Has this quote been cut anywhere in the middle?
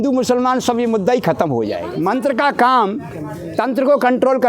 yes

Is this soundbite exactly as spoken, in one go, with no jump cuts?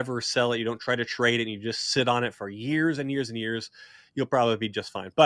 yes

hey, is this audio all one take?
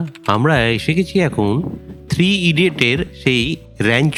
yes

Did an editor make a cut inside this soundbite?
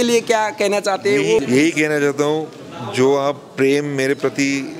yes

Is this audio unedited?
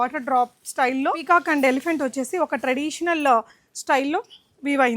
no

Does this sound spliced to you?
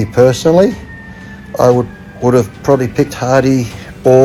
no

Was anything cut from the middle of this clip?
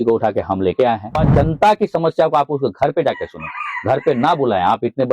yes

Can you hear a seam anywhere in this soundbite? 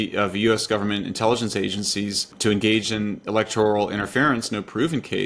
yes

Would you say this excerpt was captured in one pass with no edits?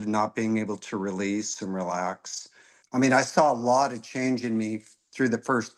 no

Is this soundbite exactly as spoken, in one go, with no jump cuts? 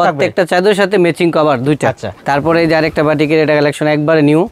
no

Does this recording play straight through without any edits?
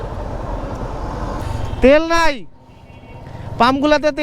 no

